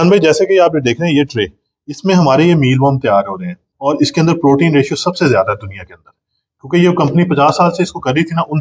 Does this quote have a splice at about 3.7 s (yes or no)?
yes